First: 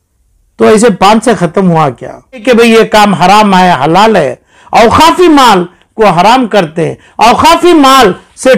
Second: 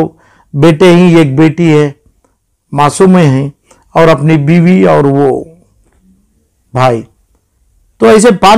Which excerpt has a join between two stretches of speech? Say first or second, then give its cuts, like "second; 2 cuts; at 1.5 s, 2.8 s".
first; 1 cut; at 2.4 s